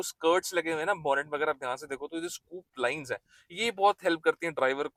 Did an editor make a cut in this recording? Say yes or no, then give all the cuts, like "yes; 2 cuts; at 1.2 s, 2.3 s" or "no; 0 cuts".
no; 0 cuts